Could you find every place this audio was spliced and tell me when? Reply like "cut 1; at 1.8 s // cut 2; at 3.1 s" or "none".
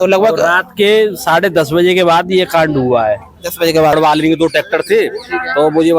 cut 1; at 4.0 s